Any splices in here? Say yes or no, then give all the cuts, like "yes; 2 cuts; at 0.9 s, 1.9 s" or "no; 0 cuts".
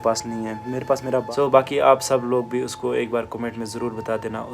yes; 1 cut; at 1.3 s